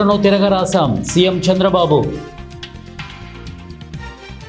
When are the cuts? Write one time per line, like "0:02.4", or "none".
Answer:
none

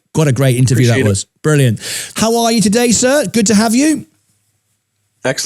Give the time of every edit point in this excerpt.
0:02.0

